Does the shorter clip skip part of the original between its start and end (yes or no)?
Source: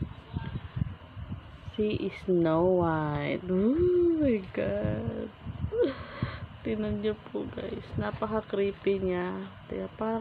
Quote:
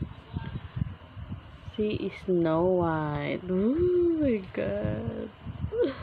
no